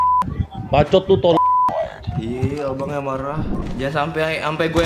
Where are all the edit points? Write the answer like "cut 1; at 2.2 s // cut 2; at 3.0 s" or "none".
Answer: cut 1; at 3.6 s